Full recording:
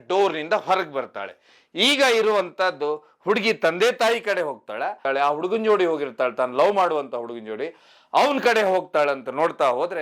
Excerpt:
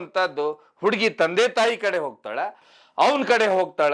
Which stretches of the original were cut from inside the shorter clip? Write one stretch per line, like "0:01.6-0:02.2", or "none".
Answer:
0:05.0-0:07.7